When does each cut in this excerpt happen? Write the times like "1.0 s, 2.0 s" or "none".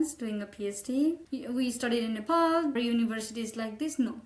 1.3 s, 2.7 s